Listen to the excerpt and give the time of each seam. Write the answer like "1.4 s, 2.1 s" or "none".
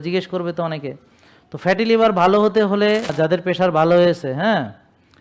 3.1 s